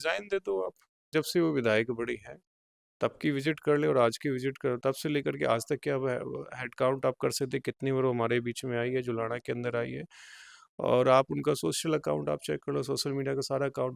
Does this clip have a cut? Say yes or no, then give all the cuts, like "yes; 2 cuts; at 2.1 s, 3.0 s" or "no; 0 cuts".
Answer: yes; 1 cut; at 1.1 s